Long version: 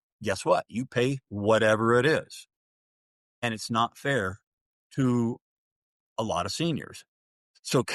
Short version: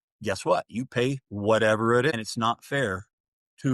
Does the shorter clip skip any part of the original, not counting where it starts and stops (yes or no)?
yes